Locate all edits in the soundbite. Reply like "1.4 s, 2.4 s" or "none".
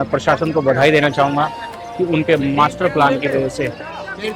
none